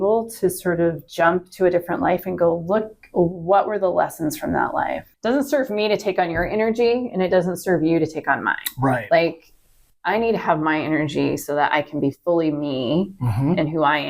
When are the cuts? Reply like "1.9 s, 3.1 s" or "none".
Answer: 5.1 s